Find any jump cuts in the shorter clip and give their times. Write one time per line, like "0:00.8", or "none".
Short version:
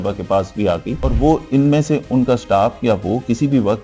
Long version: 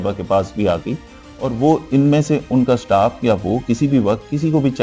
0:01.0